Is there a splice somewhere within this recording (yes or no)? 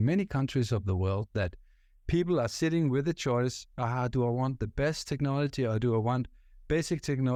no